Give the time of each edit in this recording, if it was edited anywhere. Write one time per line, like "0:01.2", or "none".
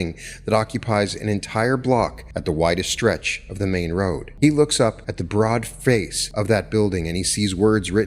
0:02.3
0:04.3
0:05.1
0:06.2